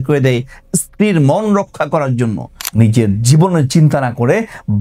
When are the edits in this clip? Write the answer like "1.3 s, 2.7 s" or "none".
2.5 s